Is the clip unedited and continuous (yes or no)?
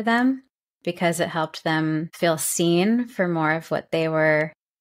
no